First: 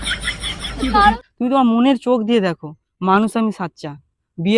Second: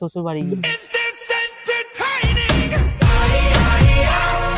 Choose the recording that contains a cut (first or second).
first